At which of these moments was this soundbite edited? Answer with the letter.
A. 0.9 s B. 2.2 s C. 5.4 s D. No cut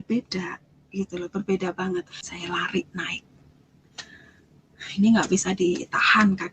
B